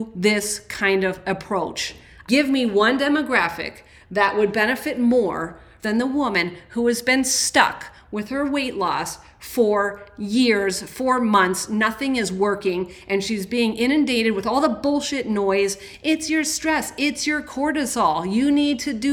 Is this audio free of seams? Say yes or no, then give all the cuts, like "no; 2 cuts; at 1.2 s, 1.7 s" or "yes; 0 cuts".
yes; 0 cuts